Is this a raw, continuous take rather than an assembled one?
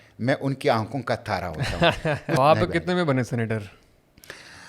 no; 1 cut; at 2.4 s

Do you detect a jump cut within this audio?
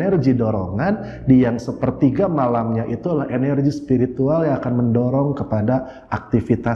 no; 0 cuts

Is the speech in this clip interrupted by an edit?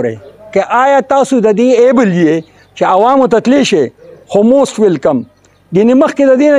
no; 0 cuts

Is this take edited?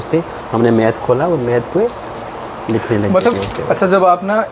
yes; 1 cut; at 3.3 s

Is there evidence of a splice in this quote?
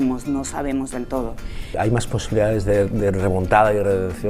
yes; 1 cut; at 1.8 s

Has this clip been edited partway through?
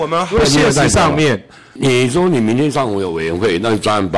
yes; 1 cut; at 1.7 s

